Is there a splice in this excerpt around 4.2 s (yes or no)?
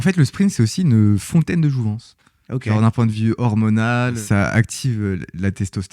yes